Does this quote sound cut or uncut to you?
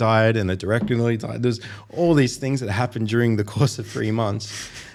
uncut